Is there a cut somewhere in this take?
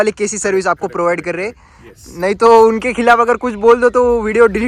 no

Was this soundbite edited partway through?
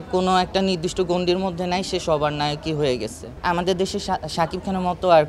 yes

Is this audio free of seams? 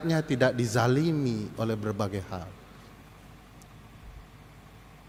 yes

